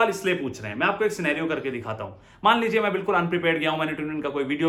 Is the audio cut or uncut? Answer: uncut